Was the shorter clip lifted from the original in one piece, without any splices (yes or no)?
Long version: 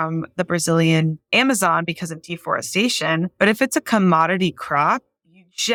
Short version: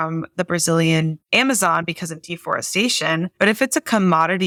yes